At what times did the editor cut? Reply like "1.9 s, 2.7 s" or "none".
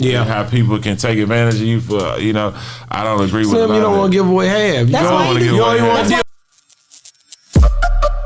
6.2 s